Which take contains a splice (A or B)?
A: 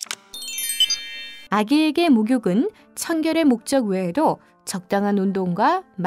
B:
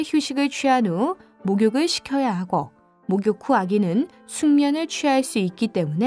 A